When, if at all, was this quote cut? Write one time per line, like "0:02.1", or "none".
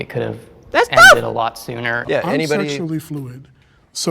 0:02.0

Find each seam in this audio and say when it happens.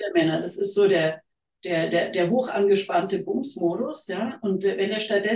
none

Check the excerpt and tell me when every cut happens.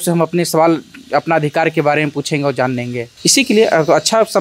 0:03.0

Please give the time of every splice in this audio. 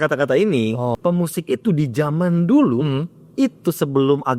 0:01.0

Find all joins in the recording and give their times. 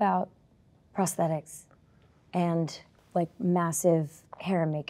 none

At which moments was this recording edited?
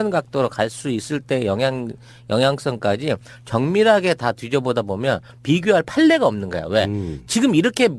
none

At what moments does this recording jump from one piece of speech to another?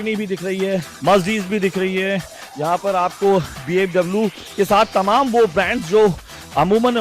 0:00.9

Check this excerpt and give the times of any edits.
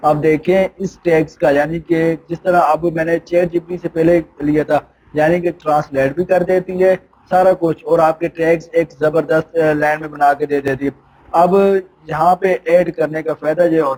none

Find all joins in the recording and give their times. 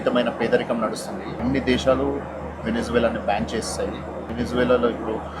0:01.4
0:04.2

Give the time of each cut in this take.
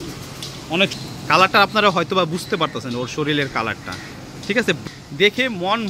0:00.9
0:04.8

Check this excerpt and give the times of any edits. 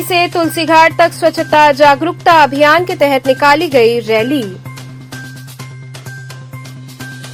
none

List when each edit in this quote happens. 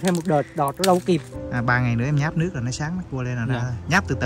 0:01.4

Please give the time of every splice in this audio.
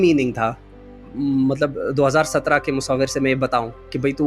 0:01.0

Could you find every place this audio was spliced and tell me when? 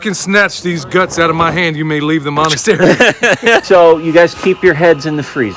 0:03.6

